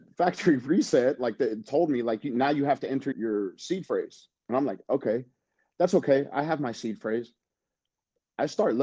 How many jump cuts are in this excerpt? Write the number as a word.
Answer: one